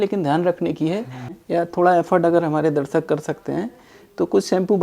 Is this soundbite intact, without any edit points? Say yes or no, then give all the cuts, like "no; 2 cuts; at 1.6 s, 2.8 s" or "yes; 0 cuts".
no; 1 cut; at 1.4 s